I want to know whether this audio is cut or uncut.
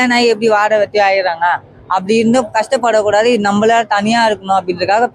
uncut